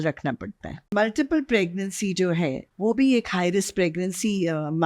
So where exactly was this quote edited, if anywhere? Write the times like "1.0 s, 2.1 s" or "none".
0.9 s, 2.7 s